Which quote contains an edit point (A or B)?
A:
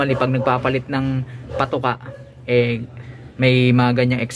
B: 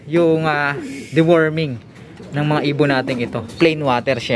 B